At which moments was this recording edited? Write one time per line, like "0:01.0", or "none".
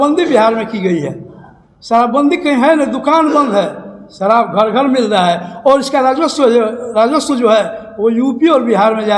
none